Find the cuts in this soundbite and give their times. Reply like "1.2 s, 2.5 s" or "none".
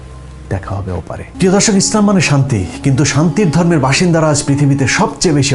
1.3 s